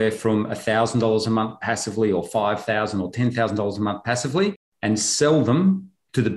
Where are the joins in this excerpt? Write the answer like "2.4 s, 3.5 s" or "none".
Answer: none